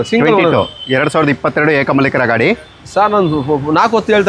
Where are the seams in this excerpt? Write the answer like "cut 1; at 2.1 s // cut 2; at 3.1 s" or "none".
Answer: cut 1; at 2.8 s